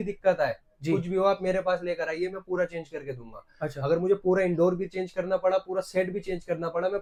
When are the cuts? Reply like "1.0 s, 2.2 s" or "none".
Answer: none